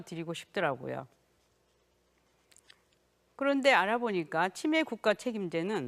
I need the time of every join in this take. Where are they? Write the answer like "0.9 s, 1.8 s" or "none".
5.0 s